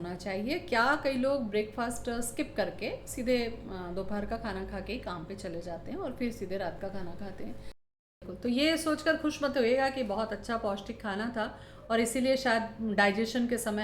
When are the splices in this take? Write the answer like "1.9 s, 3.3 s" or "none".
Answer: 7.9 s